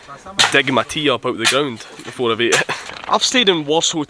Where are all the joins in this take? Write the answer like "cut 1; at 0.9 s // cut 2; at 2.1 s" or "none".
cut 1; at 2.9 s